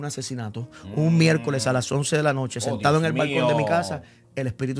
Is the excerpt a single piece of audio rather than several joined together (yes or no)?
yes